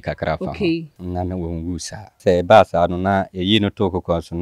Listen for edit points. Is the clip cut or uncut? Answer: cut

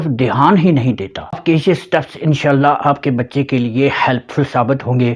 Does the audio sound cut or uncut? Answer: cut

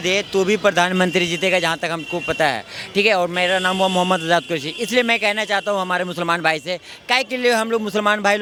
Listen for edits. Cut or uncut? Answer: uncut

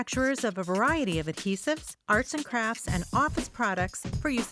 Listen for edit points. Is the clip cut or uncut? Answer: uncut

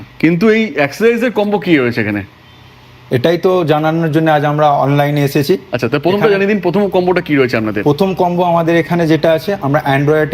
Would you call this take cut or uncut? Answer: uncut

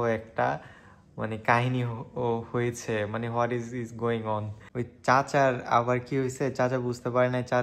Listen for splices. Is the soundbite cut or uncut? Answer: cut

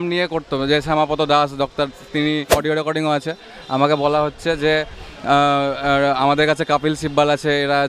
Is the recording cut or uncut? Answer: cut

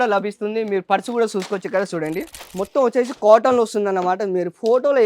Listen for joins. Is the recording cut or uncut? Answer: cut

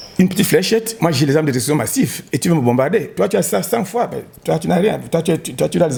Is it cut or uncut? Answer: uncut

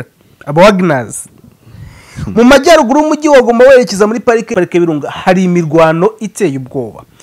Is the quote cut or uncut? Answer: cut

